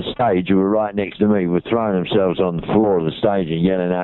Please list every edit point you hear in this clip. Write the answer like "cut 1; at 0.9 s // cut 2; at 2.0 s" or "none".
none